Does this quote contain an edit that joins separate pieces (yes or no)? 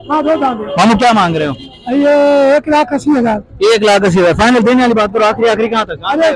no